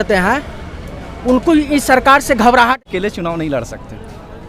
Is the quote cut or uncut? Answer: cut